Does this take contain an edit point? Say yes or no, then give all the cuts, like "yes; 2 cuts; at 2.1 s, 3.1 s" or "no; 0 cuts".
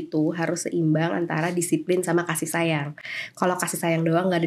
no; 0 cuts